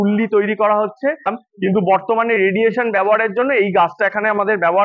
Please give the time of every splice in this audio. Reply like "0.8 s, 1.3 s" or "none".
1.3 s

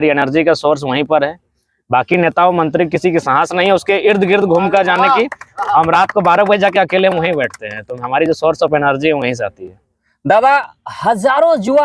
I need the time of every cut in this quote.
none

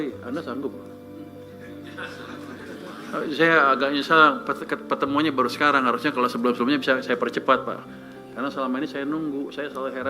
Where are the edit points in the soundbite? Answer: none

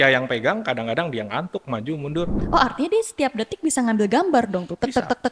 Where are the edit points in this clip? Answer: 2.4 s

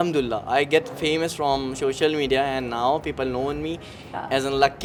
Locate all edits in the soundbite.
none

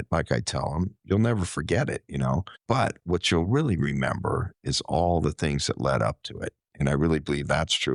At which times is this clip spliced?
2.5 s

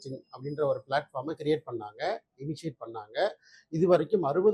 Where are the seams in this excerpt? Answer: none

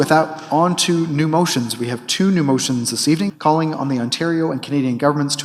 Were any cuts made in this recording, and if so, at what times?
3.3 s

